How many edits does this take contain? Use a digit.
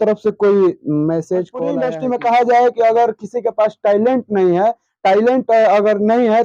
1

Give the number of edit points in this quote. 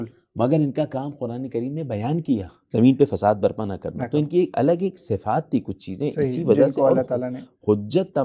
1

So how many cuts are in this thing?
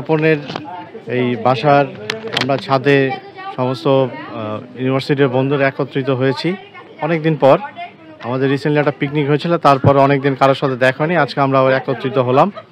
0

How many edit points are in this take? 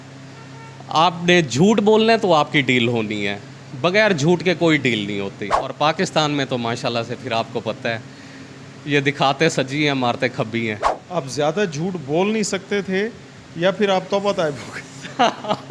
2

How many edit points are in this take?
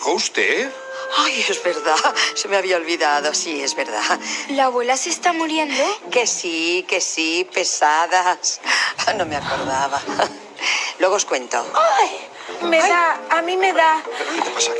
1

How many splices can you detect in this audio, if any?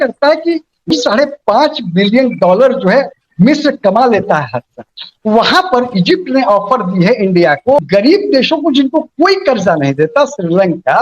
2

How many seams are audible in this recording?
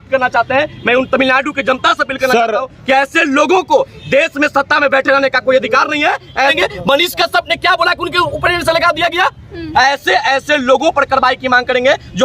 2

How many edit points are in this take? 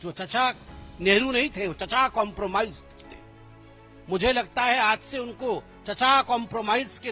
2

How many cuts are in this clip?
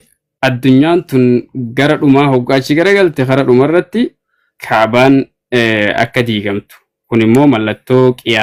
0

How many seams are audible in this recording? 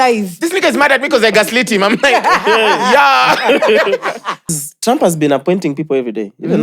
1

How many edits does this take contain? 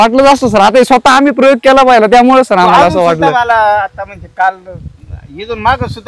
0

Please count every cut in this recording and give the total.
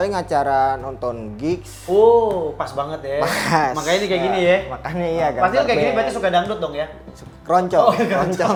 0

